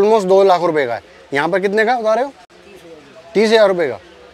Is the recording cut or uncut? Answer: uncut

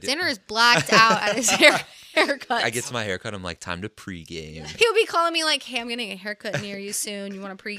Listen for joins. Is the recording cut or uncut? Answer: cut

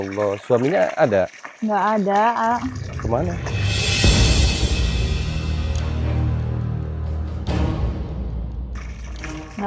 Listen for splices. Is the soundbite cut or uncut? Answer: uncut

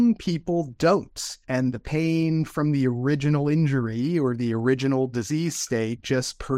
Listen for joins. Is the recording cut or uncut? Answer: uncut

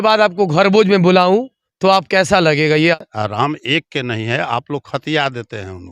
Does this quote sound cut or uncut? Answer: cut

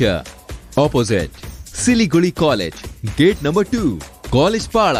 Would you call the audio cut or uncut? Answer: uncut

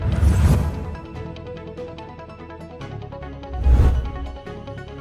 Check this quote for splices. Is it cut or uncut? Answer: cut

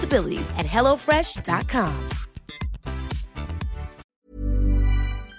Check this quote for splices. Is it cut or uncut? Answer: cut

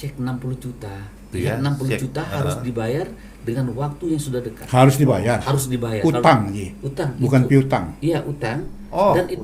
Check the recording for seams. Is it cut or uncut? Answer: cut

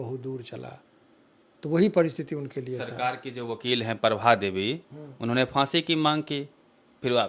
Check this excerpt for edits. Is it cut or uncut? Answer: uncut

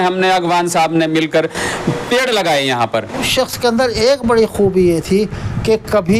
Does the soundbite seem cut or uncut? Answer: cut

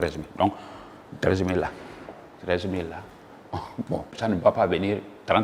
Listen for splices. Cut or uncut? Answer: cut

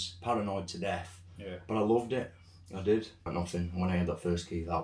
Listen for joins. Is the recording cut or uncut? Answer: cut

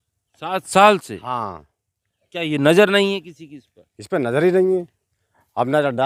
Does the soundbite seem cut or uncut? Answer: uncut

